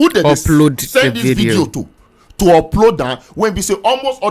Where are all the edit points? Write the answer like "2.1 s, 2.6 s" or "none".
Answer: none